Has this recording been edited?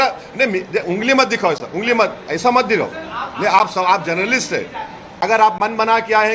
yes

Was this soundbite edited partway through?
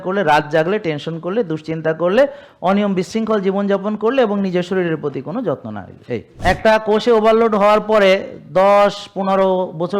yes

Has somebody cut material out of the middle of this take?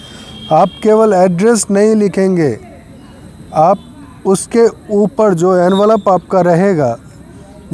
no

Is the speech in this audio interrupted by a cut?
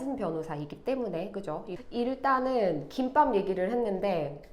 yes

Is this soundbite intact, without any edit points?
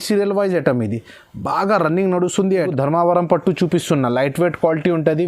no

